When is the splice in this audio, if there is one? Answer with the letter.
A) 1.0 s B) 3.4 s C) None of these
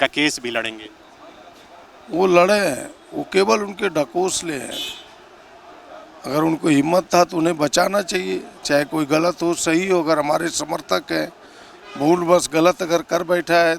C